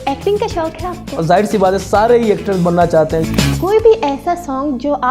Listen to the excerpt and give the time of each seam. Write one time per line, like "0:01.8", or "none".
0:01.1
0:03.3